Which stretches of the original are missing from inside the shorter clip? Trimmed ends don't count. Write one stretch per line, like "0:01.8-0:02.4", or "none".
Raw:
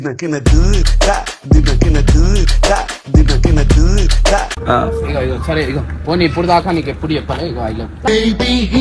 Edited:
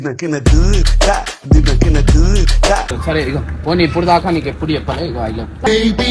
0:03.0-0:05.4